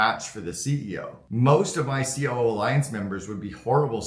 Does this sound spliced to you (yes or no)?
yes